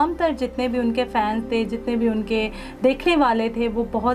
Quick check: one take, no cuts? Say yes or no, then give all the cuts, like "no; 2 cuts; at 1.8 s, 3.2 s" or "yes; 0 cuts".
yes; 0 cuts